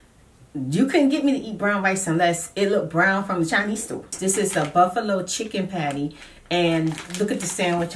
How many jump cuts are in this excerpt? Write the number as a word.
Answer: one